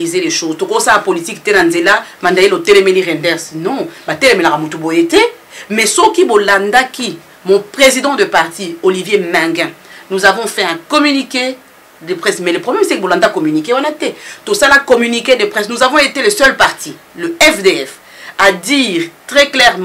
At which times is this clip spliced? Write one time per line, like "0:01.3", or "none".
none